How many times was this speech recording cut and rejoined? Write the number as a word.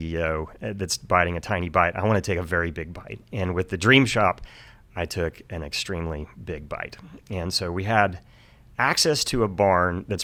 zero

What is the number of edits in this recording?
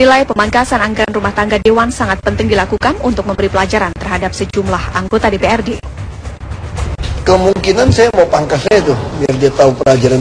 zero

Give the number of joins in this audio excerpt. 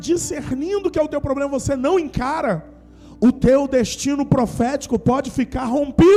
zero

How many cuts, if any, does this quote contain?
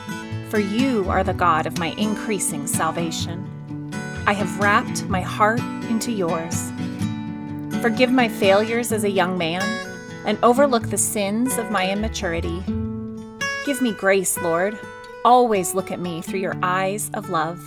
two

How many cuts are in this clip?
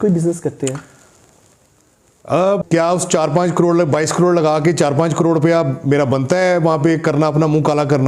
one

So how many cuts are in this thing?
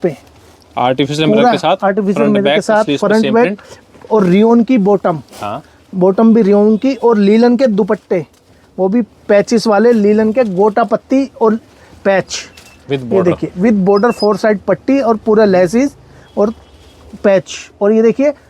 zero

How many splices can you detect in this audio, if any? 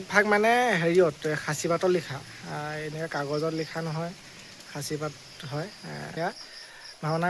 one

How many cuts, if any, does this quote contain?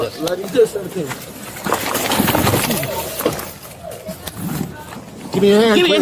one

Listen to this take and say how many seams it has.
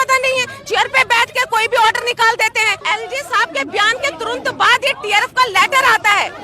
one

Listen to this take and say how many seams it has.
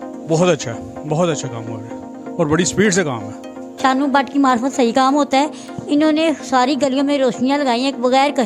one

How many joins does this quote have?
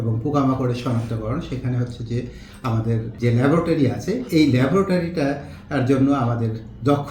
one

